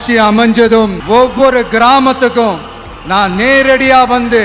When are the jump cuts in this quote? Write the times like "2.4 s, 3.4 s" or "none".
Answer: 1.0 s